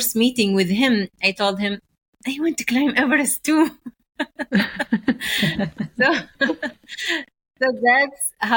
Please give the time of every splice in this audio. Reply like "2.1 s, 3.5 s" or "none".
none